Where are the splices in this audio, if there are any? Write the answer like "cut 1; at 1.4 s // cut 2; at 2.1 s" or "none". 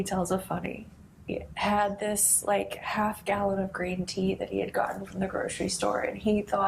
cut 1; at 1.4 s